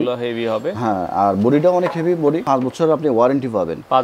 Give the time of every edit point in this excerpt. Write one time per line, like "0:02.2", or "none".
0:02.4